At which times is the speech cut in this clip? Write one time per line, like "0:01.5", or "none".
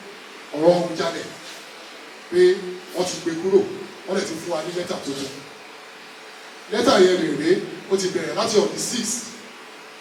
none